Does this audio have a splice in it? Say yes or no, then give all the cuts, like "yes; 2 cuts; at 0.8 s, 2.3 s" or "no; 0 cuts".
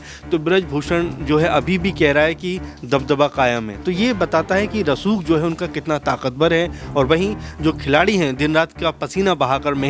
no; 0 cuts